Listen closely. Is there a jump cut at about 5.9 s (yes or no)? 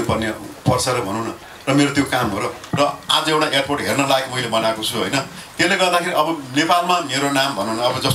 no